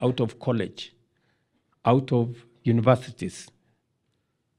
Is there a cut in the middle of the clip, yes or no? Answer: no